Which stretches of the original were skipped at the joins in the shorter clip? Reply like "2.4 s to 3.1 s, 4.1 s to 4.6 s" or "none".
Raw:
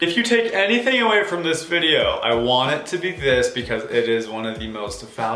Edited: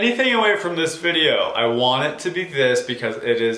none

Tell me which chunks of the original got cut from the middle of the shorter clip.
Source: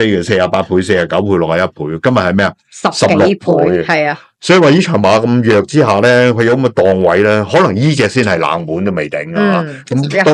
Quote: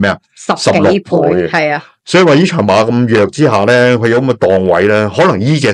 none

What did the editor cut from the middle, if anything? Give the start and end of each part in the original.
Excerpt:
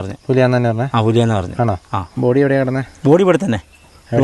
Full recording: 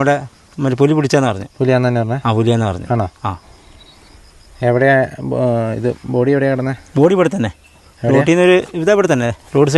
3.4 s to 6.0 s

